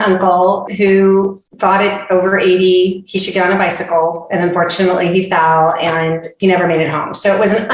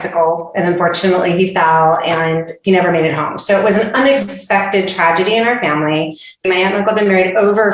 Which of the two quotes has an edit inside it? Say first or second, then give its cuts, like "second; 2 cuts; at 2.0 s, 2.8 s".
second; 1 cut; at 6.4 s